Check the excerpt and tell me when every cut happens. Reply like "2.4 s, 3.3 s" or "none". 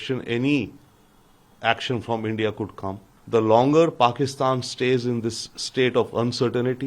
3.1 s